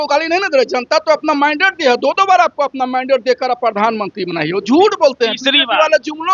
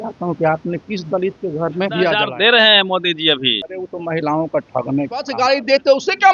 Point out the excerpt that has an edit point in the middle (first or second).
second